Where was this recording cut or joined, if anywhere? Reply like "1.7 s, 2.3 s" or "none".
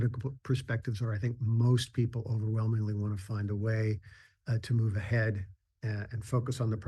none